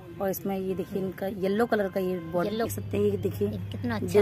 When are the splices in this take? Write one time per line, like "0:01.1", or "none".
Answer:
0:02.8